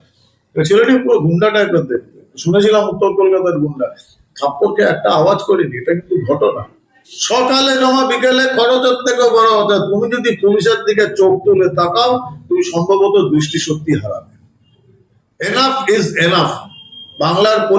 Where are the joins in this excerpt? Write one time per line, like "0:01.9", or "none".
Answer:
0:07.1